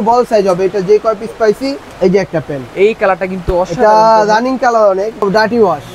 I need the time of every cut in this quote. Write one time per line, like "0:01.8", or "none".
0:01.8
0:05.2